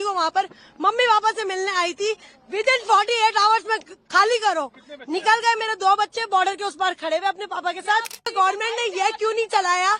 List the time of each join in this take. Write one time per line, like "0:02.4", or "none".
0:08.3